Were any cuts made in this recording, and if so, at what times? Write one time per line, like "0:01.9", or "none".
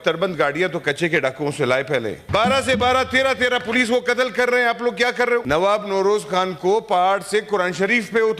0:02.3
0:05.4